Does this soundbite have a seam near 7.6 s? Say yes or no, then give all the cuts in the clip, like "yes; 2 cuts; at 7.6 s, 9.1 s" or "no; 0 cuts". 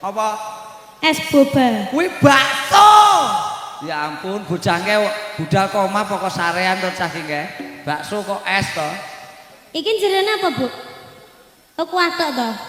no; 0 cuts